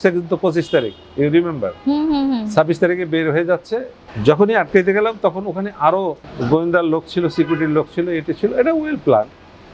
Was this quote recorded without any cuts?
yes; 0 cuts

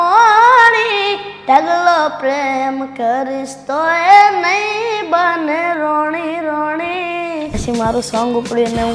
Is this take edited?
yes; 1 cut; at 7.6 s

